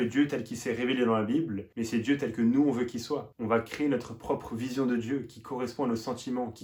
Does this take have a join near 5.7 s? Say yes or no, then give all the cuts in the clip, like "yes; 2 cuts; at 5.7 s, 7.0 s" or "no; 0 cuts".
no; 0 cuts